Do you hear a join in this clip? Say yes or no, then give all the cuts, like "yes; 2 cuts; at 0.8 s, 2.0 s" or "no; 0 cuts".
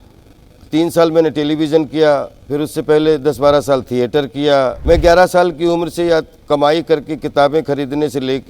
yes; 1 cut; at 4.8 s